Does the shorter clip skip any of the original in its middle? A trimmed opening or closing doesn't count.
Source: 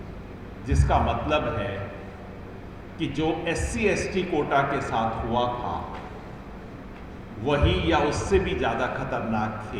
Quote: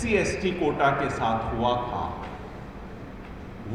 no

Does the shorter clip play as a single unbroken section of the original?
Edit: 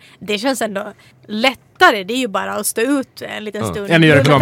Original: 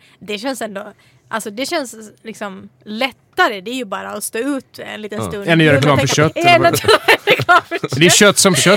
no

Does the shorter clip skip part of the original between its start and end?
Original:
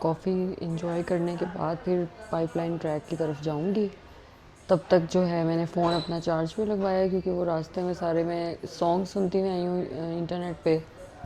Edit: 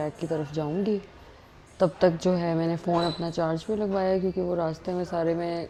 no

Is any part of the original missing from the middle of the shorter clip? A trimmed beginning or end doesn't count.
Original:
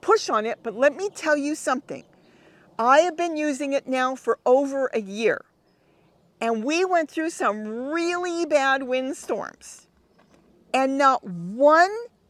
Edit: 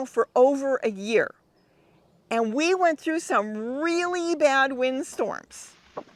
no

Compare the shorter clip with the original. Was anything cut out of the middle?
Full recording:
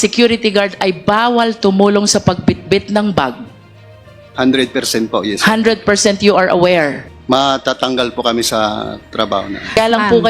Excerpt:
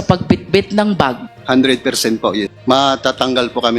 yes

